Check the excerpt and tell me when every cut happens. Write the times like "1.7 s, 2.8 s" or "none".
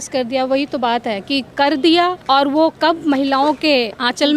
2.2 s